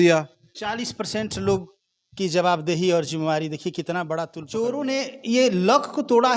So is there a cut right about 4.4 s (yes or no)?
yes